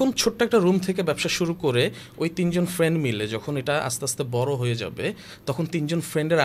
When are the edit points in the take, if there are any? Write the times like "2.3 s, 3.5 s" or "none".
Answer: none